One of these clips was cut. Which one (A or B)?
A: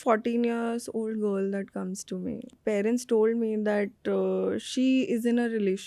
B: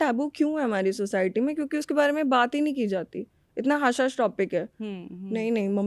A